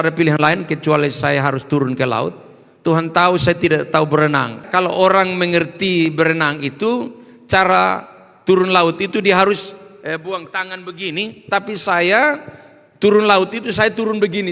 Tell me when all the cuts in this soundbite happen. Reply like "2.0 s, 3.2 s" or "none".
4.7 s